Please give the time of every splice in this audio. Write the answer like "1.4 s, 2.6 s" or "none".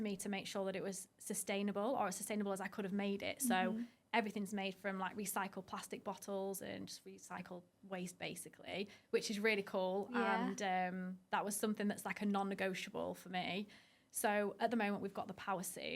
none